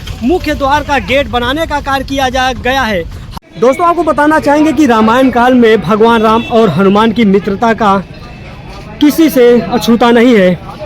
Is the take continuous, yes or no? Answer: no